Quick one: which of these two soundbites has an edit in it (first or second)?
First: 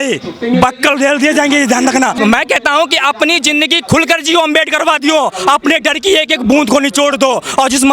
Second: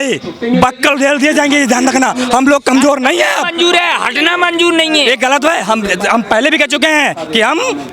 first